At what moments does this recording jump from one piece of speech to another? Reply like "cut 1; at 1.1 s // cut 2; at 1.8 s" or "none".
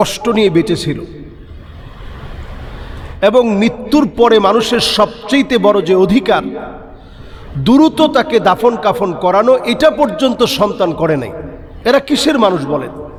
none